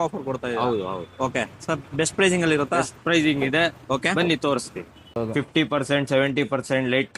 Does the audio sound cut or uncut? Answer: cut